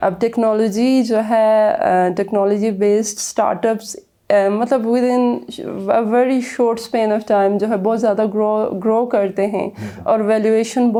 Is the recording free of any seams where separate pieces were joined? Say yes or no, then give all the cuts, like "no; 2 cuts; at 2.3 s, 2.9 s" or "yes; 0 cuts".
yes; 0 cuts